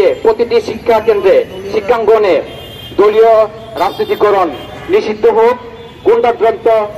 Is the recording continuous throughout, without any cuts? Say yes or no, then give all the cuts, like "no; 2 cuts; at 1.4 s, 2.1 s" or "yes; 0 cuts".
yes; 0 cuts